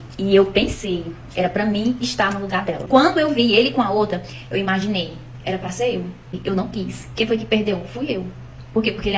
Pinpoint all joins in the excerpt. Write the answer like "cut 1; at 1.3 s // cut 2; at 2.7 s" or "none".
cut 1; at 2.8 s // cut 2; at 6.3 s